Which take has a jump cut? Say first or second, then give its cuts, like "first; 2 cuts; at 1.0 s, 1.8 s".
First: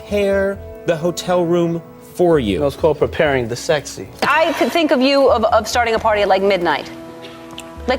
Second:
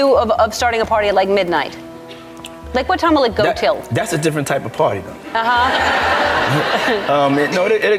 first; 1 cut; at 4.2 s